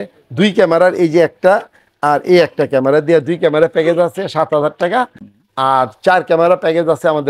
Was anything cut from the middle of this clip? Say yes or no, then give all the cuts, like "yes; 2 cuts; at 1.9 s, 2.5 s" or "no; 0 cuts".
no; 0 cuts